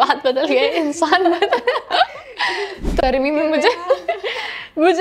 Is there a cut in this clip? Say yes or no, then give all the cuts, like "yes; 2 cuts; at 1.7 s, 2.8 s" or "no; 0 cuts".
yes; 1 cut; at 3.0 s